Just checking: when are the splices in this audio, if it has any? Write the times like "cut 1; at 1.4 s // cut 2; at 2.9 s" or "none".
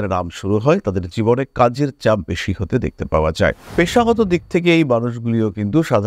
cut 1; at 3.6 s